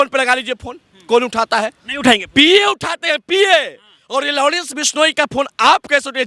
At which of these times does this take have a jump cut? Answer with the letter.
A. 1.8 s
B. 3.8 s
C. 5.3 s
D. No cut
D